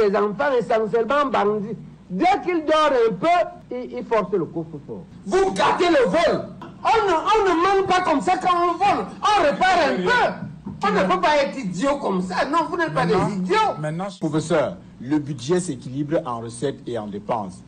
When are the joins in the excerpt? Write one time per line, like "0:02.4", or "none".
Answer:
0:03.6
0:10.8
0:14.1